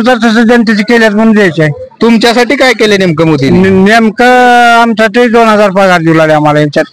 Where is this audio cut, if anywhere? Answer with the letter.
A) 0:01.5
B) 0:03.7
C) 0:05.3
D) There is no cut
D